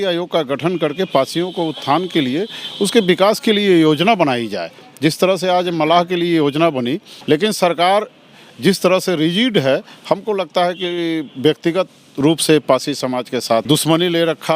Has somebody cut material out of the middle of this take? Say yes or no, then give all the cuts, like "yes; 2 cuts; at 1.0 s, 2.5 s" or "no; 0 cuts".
yes; 2 cuts; at 7.1 s, 13.6 s